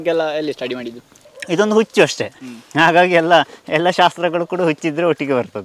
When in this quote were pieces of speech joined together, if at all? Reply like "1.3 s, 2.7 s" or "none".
none